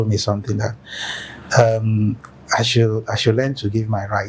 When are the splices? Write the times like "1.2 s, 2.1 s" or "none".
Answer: none